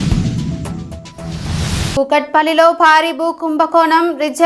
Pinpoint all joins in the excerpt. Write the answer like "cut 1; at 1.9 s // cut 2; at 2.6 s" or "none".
cut 1; at 1.9 s